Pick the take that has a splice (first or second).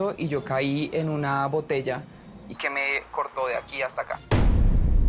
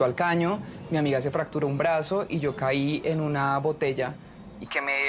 first